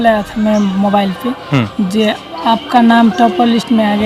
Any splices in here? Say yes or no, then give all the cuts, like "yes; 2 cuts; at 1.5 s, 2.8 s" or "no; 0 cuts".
no; 0 cuts